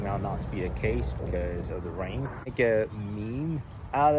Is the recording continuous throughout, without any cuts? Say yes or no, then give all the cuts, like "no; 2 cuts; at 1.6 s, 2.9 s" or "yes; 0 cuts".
no; 1 cut; at 2.5 s